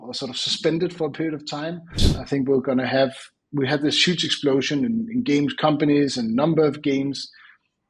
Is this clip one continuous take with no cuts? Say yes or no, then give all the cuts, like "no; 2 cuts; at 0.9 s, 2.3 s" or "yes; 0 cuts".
no; 1 cut; at 2.1 s